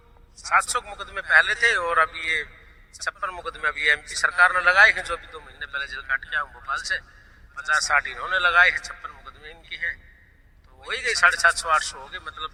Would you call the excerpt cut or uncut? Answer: uncut